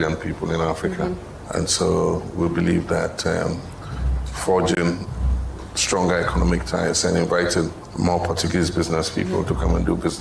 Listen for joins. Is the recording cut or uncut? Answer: cut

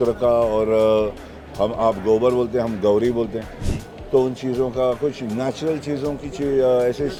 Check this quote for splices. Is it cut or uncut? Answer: uncut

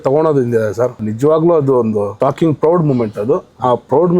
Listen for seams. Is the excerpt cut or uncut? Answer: cut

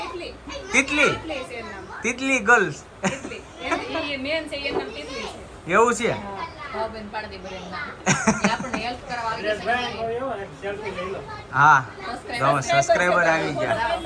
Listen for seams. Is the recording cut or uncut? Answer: uncut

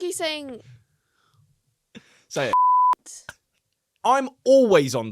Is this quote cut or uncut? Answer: cut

